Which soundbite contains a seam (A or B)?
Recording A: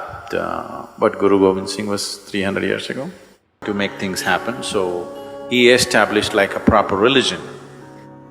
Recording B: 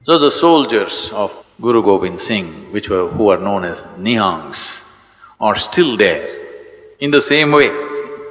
A